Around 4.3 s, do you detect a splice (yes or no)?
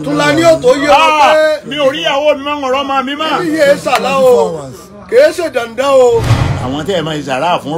no